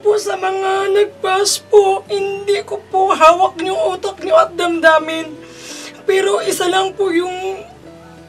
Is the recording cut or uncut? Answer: cut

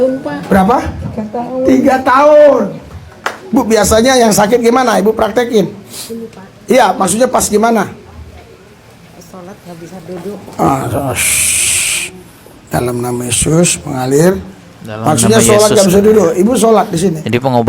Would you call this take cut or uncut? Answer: uncut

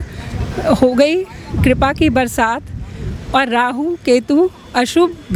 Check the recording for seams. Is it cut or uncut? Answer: uncut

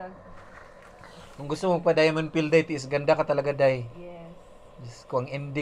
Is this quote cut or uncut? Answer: uncut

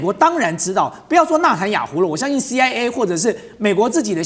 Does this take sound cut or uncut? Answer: uncut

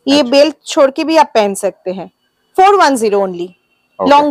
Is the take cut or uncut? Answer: uncut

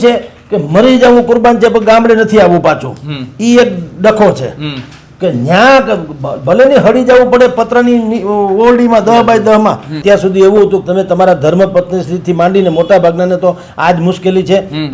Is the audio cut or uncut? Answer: cut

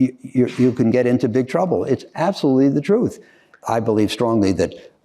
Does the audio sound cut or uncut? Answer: cut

